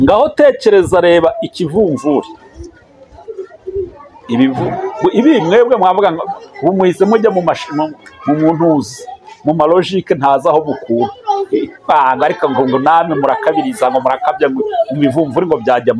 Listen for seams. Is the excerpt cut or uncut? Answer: uncut